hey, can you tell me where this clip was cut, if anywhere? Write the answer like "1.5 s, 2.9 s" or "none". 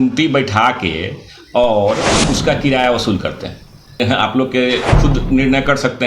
4.0 s